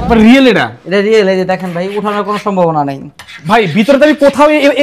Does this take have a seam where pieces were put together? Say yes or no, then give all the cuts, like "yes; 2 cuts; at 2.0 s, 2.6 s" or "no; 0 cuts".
no; 0 cuts